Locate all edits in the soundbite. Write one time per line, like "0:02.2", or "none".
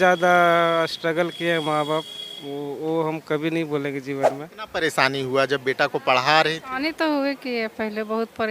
0:04.5